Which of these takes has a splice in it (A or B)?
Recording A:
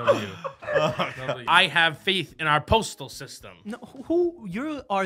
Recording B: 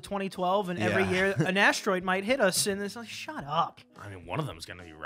A